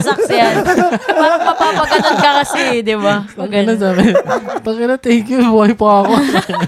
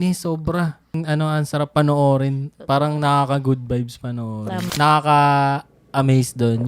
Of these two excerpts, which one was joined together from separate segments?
second; 2 cuts; at 1.0 s, 4.7 s

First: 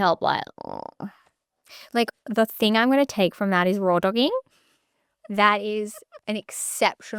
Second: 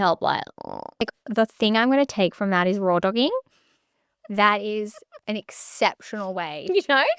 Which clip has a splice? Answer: second; 1 cut; at 1.0 s

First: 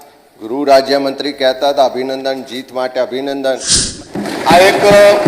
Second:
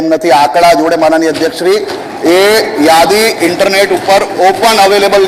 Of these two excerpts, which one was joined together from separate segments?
first; 1 cut; at 3.9 s

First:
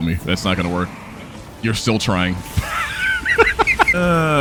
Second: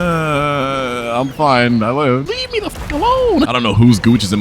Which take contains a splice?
second; 2 cuts; at 2.3 s, 3.5 s

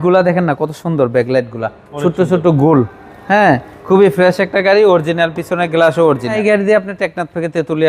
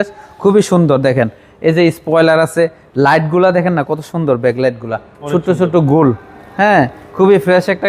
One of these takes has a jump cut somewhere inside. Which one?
first; 1 cut; at 6.4 s

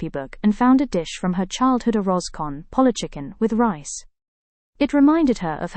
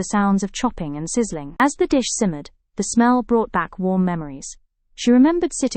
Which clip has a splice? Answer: second; 1 cut; at 1.6 s

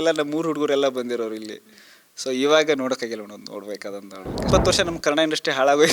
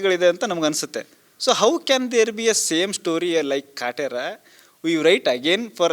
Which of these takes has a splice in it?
first; 1 cut; at 4.5 s

